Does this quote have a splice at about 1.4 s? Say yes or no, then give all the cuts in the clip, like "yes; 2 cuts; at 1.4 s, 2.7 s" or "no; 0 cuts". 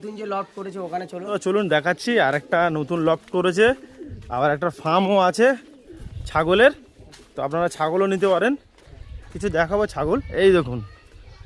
yes; 1 cut; at 1.4 s